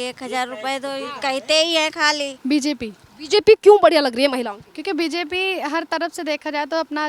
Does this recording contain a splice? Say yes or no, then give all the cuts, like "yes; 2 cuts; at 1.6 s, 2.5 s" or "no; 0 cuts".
yes; 1 cut; at 2.3 s